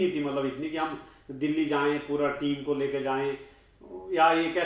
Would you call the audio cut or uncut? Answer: uncut